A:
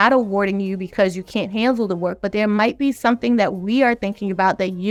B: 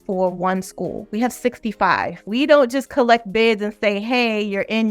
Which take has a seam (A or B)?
B